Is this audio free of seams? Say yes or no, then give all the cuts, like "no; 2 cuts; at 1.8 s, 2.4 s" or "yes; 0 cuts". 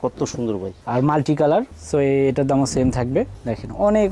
no; 1 cut; at 1.8 s